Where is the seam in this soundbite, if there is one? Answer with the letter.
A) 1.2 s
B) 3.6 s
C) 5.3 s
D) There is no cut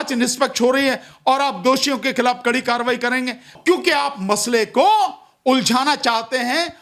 B